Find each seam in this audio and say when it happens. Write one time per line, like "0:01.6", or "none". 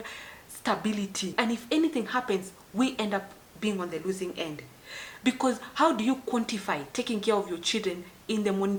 none